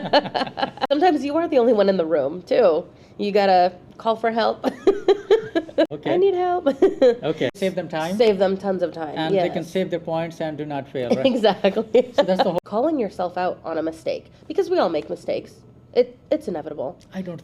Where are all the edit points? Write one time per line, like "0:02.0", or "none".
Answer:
0:00.9
0:05.9
0:07.6
0:12.6

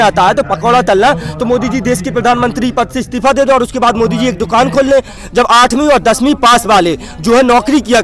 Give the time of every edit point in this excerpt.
0:05.2

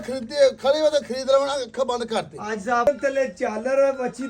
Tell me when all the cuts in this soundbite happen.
0:02.9

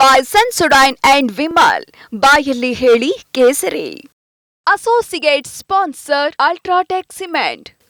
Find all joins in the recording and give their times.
none

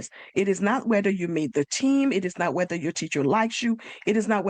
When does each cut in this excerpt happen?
none

